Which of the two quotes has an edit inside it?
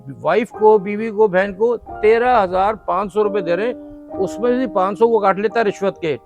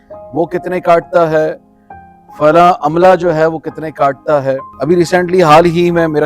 second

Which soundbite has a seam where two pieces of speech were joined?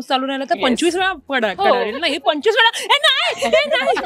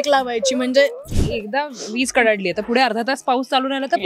second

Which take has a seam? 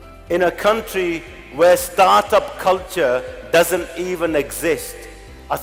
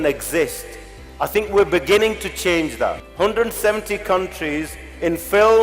second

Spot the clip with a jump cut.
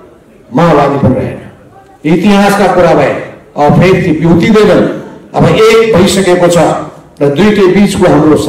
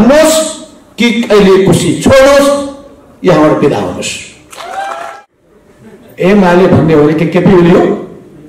second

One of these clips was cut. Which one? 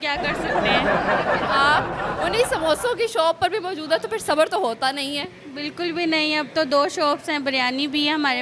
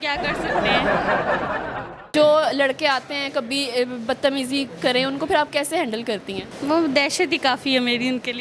second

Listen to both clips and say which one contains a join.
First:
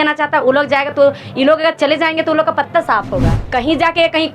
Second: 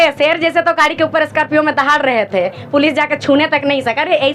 first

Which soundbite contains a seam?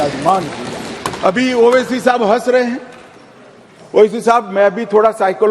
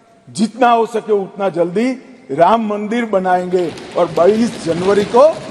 first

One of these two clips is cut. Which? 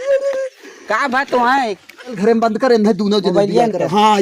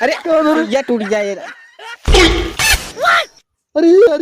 first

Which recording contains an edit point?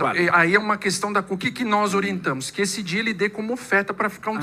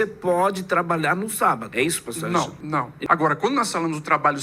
second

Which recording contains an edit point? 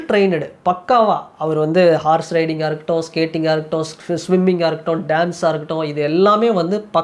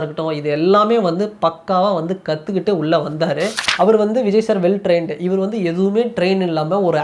second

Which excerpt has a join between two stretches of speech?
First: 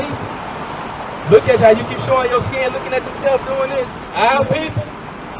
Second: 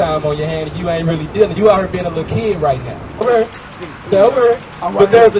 second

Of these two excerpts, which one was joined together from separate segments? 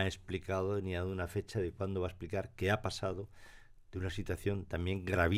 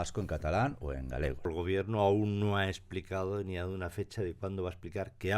second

